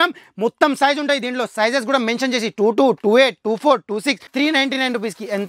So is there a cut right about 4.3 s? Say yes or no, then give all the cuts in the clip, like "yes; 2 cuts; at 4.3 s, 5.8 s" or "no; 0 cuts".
yes; 1 cut; at 4.3 s